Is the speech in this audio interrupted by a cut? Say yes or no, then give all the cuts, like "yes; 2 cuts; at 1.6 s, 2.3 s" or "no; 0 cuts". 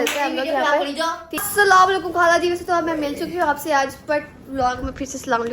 yes; 1 cut; at 1.3 s